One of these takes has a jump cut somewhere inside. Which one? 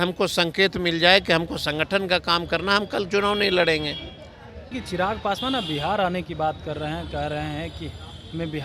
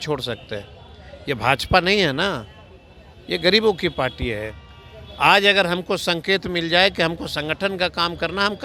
first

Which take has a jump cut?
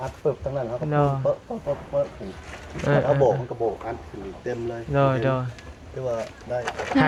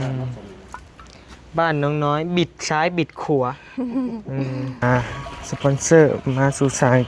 second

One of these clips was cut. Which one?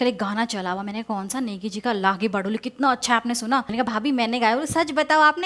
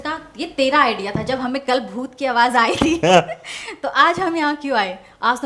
first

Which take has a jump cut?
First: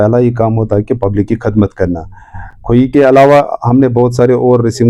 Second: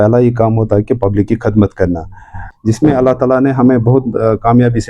second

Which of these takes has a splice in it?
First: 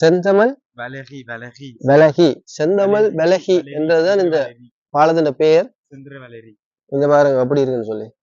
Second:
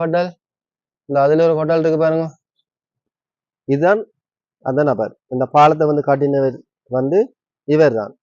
second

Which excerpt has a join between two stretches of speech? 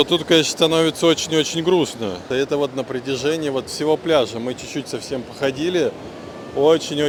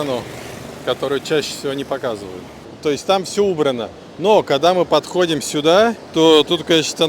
second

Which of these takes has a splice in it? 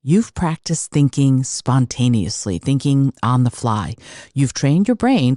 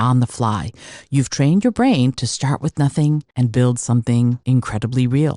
second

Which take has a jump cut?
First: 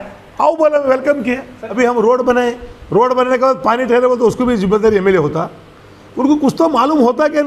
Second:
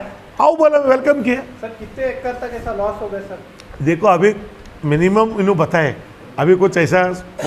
first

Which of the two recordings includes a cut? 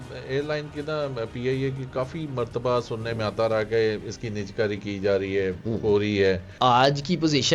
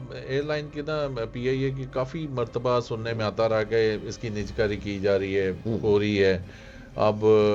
first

